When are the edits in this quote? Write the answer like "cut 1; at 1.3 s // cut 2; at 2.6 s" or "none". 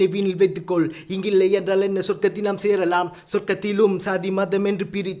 none